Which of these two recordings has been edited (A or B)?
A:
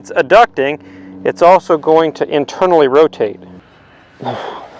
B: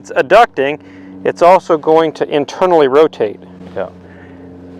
A